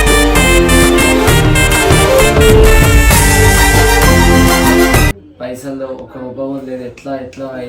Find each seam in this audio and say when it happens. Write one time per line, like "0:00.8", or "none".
0:05.1